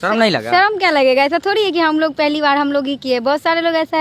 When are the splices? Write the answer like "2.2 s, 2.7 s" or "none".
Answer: none